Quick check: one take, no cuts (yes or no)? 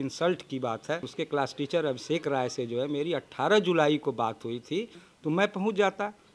no